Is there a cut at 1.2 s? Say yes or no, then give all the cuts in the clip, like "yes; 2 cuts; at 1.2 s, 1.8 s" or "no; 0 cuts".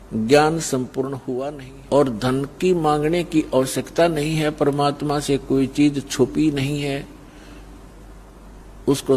yes; 1 cut; at 1.2 s